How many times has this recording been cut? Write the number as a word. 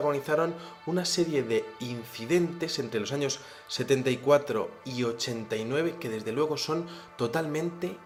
zero